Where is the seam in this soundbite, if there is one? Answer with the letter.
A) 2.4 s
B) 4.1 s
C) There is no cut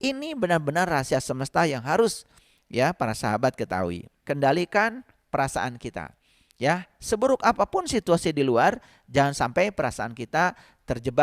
B